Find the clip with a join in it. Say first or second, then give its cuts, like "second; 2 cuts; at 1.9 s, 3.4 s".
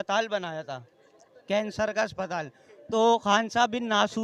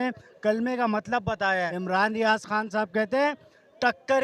second; 1 cut; at 1.7 s